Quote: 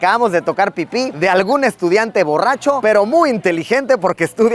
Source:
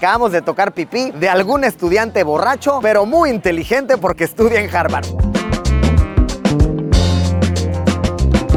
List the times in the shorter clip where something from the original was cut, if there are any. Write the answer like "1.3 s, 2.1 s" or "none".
none